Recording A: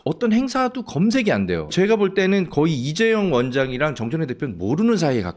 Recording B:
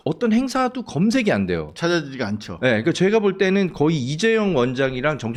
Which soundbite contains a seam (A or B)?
A